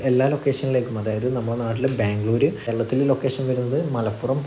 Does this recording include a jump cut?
yes; 1 cut; at 2.7 s

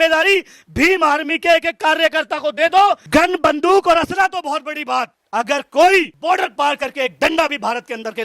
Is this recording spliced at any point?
yes; 1 cut; at 3.0 s

